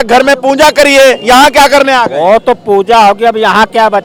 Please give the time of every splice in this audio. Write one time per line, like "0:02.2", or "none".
none